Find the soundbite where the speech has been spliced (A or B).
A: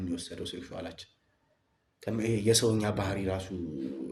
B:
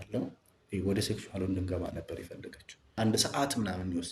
B